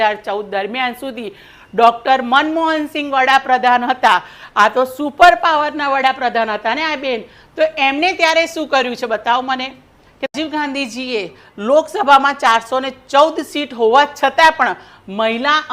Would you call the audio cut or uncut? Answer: cut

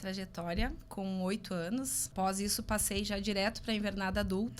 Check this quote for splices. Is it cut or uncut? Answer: cut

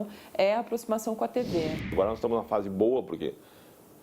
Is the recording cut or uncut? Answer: cut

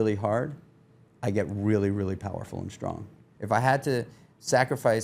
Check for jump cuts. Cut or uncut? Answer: cut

